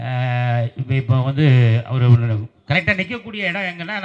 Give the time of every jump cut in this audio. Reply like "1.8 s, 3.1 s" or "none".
none